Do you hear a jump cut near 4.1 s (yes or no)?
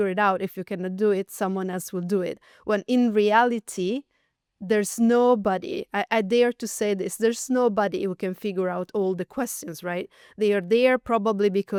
no